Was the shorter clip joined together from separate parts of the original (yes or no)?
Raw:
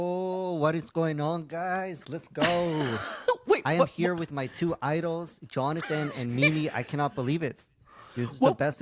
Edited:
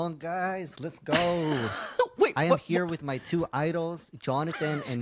no